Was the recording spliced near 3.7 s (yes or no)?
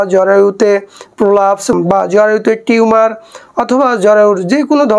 no